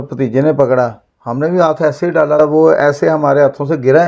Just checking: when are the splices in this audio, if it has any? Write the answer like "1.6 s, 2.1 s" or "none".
2.4 s